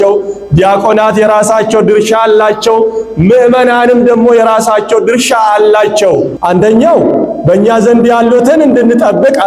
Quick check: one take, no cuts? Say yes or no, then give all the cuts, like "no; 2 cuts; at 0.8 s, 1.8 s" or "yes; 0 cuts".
no; 1 cut; at 6.3 s